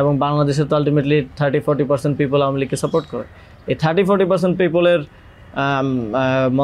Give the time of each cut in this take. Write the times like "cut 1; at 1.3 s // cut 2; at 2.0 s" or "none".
none